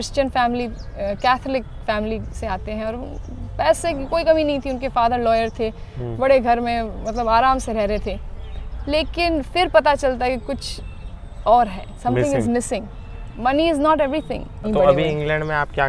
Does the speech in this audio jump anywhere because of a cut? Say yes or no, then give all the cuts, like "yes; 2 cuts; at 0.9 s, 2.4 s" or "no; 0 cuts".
yes; 1 cut; at 14.6 s